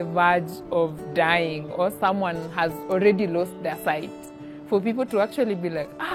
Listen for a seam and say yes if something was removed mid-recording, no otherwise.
no